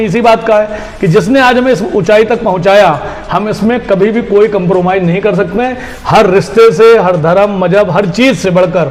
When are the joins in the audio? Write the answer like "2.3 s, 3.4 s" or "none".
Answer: none